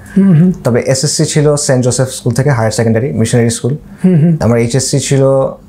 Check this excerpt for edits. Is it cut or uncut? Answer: cut